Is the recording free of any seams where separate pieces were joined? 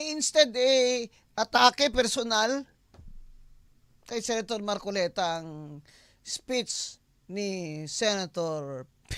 yes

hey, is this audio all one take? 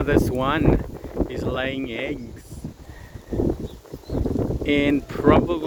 yes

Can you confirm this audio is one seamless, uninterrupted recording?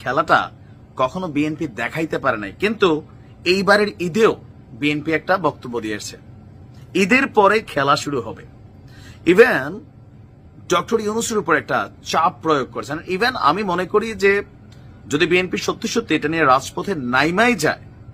yes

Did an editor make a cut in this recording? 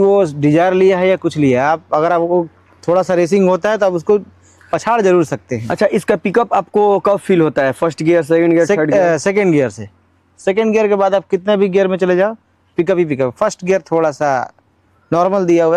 no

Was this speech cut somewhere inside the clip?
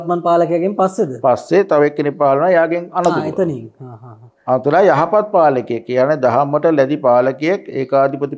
no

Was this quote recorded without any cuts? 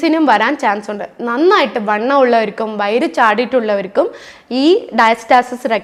yes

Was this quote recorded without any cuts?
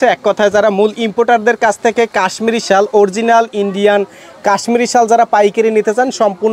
yes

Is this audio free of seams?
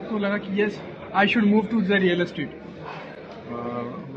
yes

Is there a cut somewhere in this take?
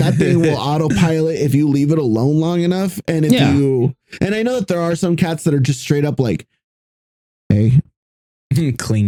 no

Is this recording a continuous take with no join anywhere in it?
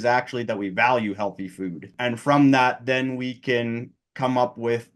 no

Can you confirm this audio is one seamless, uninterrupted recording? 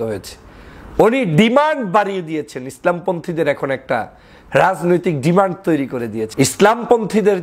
no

